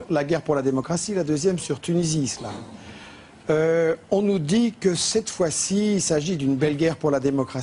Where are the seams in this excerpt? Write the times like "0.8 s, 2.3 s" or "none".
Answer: none